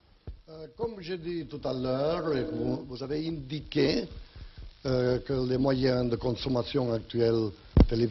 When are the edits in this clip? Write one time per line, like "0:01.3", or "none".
0:02.5